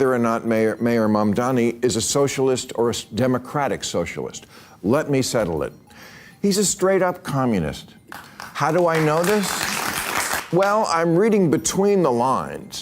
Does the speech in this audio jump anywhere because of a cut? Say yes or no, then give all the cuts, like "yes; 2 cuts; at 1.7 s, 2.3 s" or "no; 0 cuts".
yes; 1 cut; at 10.4 s